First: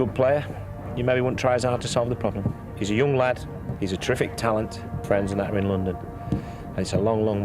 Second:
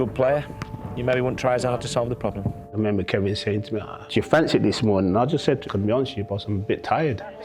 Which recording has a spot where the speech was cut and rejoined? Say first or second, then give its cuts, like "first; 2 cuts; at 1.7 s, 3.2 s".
second; 3 cuts; at 2.7 s, 4.0 s, 5.6 s